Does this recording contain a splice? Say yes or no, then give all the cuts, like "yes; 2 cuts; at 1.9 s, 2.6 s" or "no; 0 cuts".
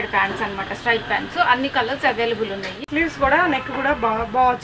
yes; 1 cut; at 2.7 s